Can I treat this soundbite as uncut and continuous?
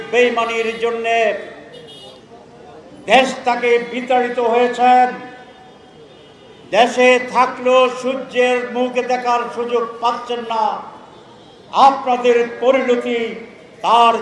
yes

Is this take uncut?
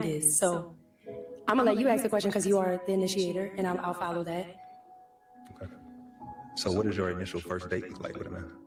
yes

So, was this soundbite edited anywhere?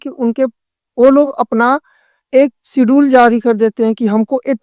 no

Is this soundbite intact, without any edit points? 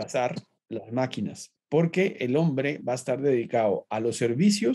no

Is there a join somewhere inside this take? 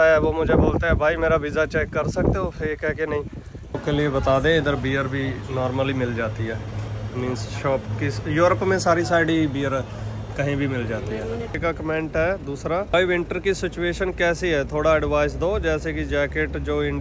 yes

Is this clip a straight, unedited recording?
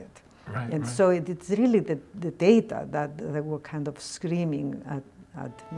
yes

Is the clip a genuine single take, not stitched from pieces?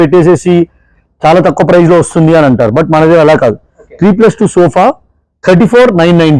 yes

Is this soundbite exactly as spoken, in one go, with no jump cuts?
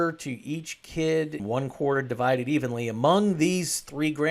no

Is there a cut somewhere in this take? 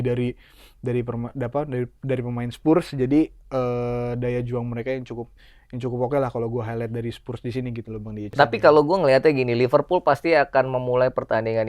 yes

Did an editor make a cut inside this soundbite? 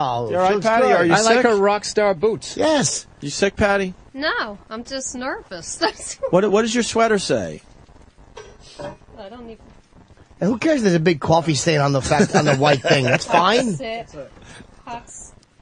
no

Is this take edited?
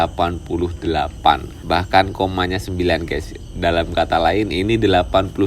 yes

